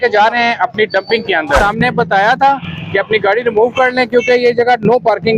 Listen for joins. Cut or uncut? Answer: cut